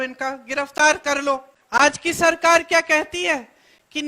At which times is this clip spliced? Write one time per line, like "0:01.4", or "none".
0:01.5